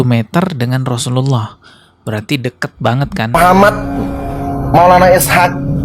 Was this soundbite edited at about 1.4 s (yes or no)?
no